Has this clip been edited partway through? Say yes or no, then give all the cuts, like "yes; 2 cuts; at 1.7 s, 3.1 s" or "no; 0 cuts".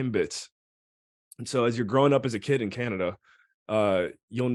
no; 0 cuts